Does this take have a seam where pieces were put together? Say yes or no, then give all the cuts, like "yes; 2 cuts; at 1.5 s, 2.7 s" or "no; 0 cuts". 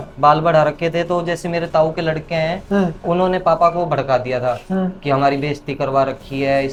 no; 0 cuts